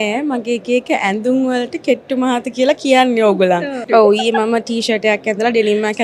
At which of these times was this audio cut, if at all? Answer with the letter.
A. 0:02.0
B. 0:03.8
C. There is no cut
B